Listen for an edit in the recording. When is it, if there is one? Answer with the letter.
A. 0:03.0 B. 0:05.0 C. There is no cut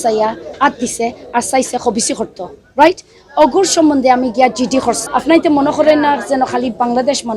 B